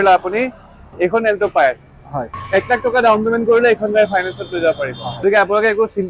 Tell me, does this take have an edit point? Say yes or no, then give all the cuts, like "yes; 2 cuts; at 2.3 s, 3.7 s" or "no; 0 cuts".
yes; 2 cuts; at 2.3 s, 5.2 s